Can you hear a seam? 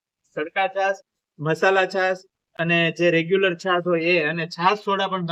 no; 0 cuts

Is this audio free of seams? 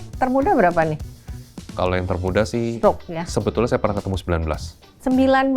yes; 0 cuts

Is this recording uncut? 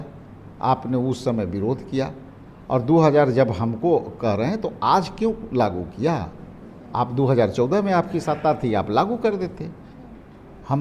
yes; 0 cuts

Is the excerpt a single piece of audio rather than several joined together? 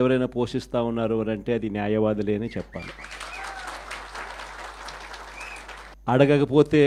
yes; 0 cuts

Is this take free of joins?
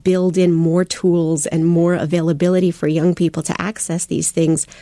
yes; 0 cuts

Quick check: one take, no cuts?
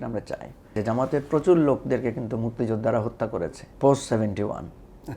no; 2 cuts; at 0.8 s, 3.6 s

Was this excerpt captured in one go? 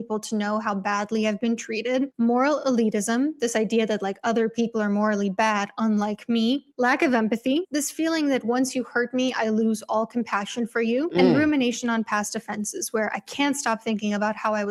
yes; 0 cuts

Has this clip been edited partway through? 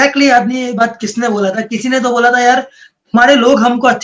no; 0 cuts

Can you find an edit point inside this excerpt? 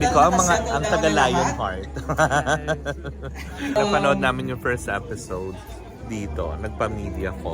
yes; 1 cut; at 3.4 s

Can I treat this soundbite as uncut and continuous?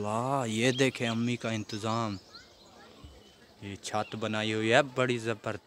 yes; 0 cuts

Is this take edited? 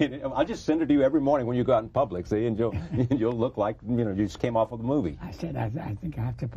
yes; 1 cut; at 2.7 s

